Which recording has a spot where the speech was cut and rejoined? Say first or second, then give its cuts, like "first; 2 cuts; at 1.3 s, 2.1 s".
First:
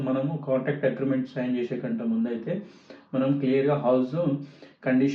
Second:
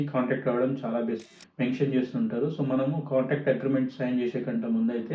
second; 1 cut; at 1.3 s